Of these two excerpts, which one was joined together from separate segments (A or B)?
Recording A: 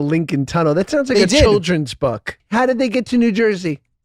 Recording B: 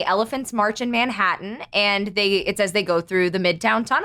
A